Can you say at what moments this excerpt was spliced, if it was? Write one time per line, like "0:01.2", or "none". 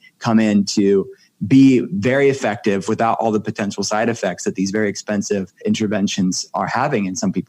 0:05.5